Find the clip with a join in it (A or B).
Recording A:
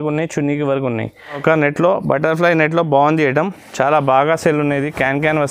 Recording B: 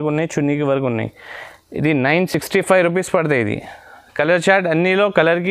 A